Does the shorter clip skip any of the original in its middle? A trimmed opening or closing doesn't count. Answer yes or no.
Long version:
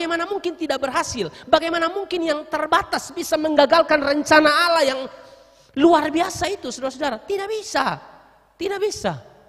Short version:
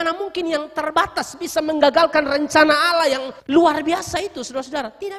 yes